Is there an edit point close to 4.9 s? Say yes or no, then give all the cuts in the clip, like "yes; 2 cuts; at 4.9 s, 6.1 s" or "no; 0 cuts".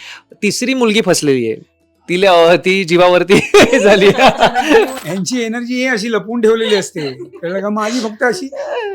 yes; 1 cut; at 4.9 s